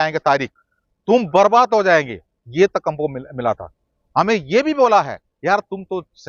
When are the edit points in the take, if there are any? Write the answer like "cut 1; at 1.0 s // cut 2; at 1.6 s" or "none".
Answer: none